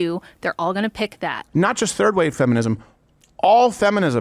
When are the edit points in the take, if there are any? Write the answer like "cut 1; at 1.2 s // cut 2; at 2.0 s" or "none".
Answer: cut 1; at 1.4 s